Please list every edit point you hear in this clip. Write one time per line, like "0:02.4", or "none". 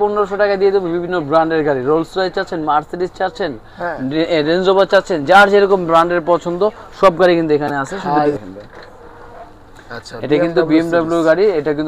0:08.3